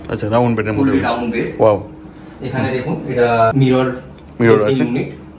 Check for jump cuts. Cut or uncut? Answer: cut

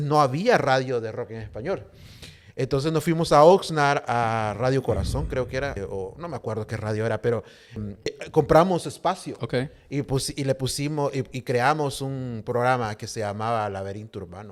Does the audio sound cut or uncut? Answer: uncut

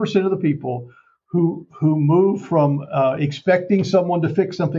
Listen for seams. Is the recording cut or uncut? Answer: uncut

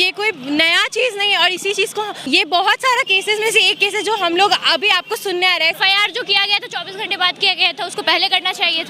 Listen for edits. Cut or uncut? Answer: cut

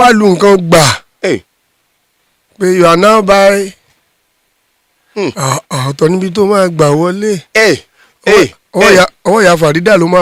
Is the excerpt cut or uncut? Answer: uncut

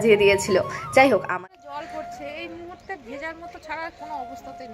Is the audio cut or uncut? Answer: cut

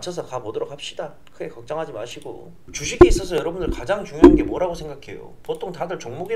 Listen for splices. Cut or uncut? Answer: cut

